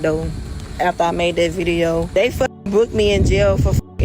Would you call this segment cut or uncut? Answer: cut